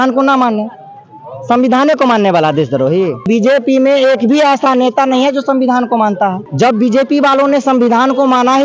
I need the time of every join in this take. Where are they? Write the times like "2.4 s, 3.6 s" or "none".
3.3 s, 6.4 s

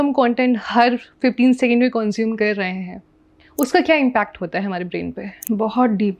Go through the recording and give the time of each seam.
5.3 s

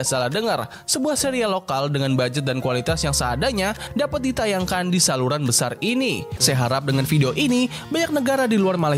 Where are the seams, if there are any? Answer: 6.3 s

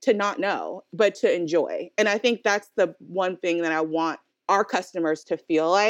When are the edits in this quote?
4.3 s

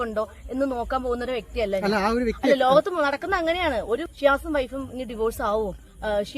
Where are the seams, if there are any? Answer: 4.1 s

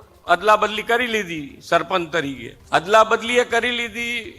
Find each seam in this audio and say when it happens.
2.5 s

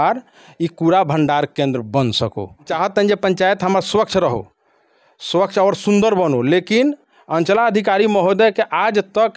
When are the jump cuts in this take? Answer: 2.7 s

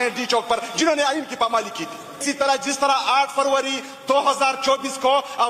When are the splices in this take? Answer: 2.2 s

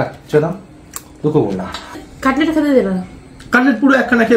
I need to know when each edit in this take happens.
none

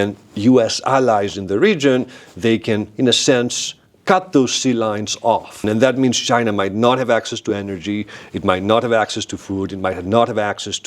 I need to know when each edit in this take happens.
5.6 s

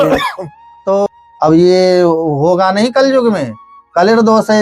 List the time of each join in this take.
1.1 s

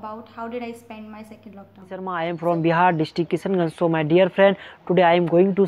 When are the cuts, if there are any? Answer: 1.8 s

